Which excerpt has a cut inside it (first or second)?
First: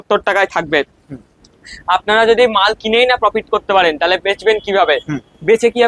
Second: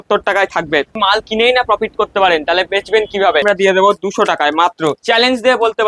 second